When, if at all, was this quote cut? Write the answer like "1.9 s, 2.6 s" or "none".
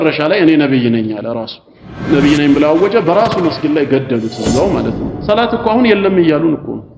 5.1 s

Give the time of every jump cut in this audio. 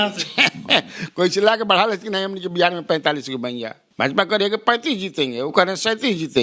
3.8 s

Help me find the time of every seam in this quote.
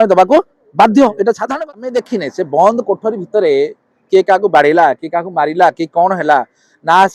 1.5 s

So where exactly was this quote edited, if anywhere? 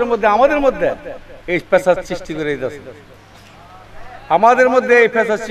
none

